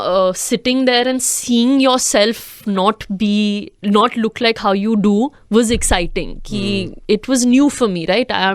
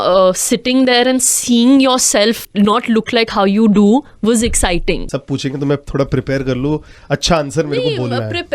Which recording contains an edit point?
second; 2 cuts; at 2.4 s, 5.1 s

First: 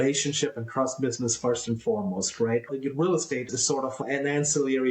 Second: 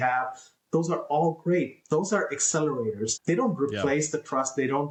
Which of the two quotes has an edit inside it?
first; 2 cuts; at 2.7 s, 3.9 s

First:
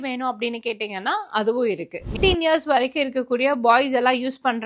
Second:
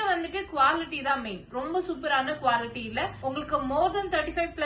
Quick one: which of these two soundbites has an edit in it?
first; 1 cut; at 2.1 s

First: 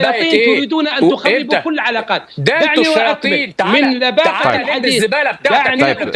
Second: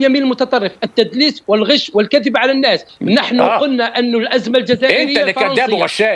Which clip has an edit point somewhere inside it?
second; 1 cut; at 2.9 s

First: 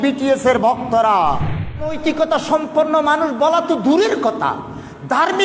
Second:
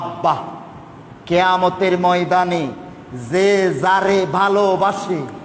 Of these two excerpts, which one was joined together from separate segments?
first; 1 cut; at 1.9 s

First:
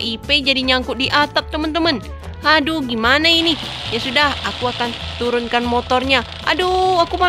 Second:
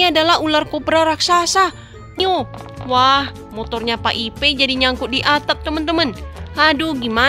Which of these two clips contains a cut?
second; 1 cut; at 2.2 s

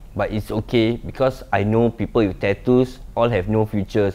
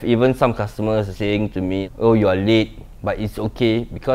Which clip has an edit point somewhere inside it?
second; 1 cut; at 1.1 s

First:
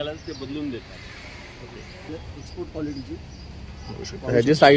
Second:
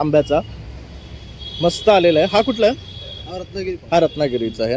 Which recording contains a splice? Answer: first; 1 cut; at 2.1 s

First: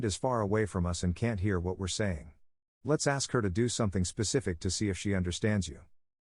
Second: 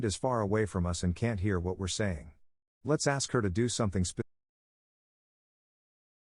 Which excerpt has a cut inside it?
first; 1 cut; at 4.3 s

